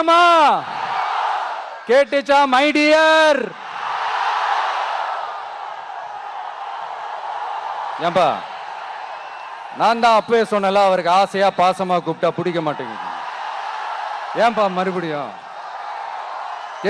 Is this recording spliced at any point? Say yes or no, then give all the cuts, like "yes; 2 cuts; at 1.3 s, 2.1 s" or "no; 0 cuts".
no; 0 cuts